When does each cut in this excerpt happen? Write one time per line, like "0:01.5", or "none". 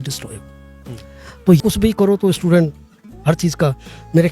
0:01.6